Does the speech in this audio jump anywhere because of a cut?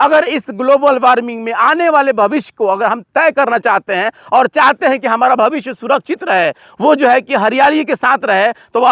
no; 0 cuts

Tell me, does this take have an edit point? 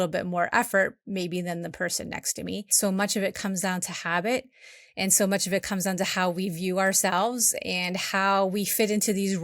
yes; 1 cut; at 2.7 s

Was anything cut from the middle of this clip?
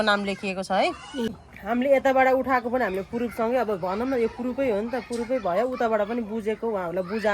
yes; 1 cut; at 1.5 s

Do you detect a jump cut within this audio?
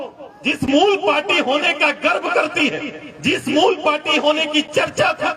no; 0 cuts

